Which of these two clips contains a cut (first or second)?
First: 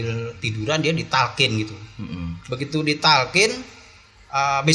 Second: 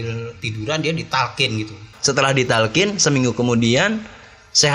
second